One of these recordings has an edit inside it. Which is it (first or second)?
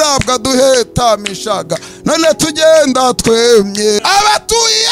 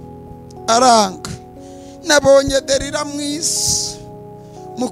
first